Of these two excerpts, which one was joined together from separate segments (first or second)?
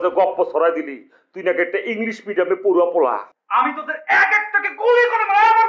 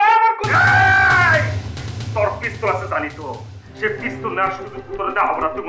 first